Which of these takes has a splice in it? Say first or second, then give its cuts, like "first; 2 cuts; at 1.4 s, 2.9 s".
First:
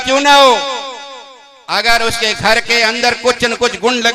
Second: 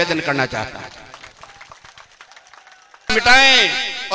second; 1 cut; at 3.1 s